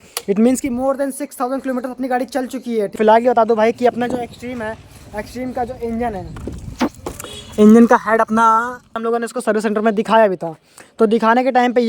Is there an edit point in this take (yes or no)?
yes